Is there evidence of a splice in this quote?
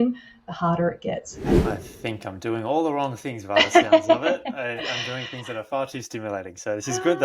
yes; 1 cut; at 1.6 s

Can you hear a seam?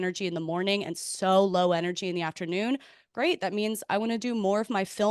no; 0 cuts

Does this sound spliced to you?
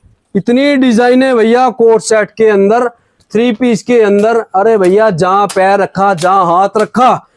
no; 0 cuts

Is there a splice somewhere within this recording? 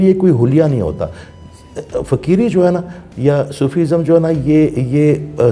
no; 0 cuts

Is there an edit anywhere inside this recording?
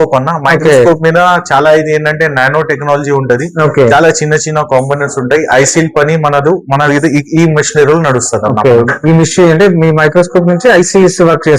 no; 0 cuts

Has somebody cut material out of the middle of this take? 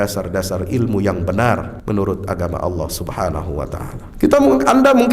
yes; 2 cuts; at 1.7 s, 4.0 s

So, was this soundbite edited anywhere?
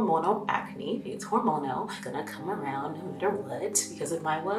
no; 0 cuts

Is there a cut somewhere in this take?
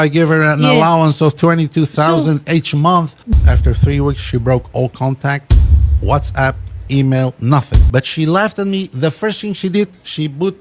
yes; 2 cuts; at 3.4 s, 7.8 s

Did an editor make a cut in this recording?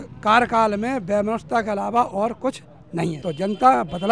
yes; 1 cut; at 3.2 s

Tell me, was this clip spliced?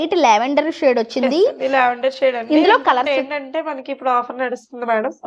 no; 0 cuts

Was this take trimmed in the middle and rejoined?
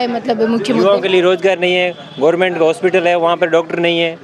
no; 0 cuts

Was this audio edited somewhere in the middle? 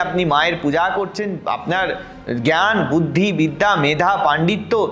yes; 1 cut; at 1.4 s

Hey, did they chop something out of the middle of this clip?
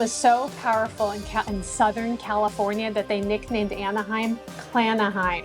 no; 0 cuts

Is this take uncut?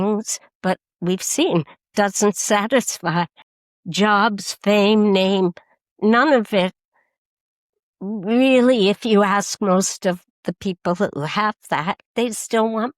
no; 1 cut; at 12.0 s

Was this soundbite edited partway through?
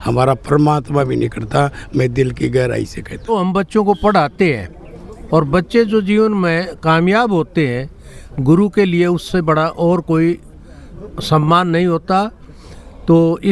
yes; 1 cut; at 3.3 s

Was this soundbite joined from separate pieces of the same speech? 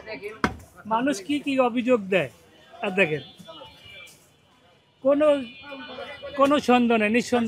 no; 0 cuts

